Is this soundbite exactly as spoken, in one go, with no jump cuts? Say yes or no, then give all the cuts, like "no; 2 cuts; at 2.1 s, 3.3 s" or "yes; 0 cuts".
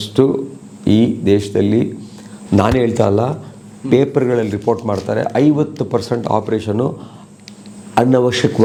yes; 0 cuts